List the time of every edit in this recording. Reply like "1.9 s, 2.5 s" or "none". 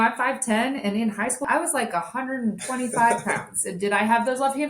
1.4 s